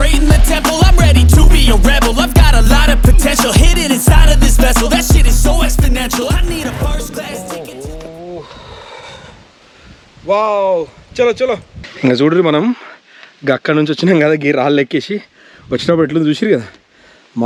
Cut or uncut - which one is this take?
uncut